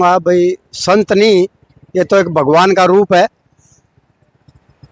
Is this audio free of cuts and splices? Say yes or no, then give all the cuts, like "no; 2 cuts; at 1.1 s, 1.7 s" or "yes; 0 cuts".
yes; 0 cuts